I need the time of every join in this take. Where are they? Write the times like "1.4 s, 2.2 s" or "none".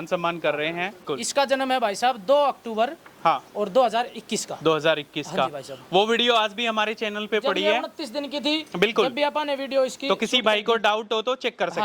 1.2 s